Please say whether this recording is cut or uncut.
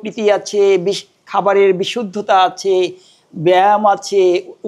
uncut